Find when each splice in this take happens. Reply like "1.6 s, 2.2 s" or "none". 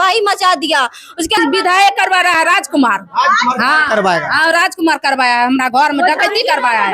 1.4 s